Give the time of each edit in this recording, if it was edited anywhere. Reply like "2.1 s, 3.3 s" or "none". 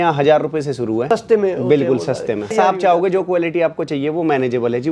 1.0 s, 2.5 s